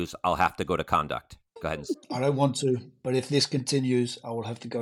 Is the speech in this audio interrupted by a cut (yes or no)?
yes